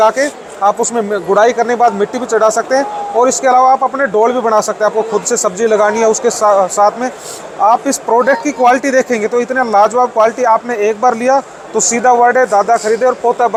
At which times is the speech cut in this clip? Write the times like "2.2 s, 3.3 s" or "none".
none